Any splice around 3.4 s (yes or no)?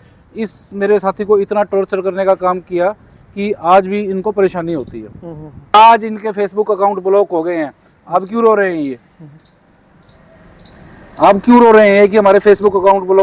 no